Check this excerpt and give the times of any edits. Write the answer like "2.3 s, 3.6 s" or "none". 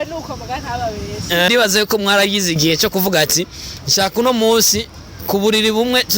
1.5 s